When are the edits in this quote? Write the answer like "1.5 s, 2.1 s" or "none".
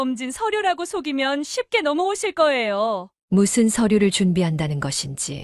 3.1 s